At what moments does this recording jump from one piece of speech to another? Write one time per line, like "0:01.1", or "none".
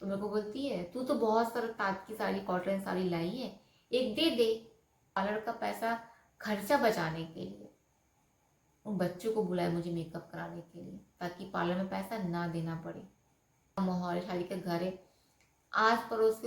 0:05.2
0:13.8